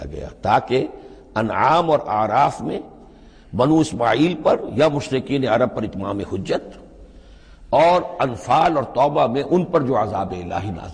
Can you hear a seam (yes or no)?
no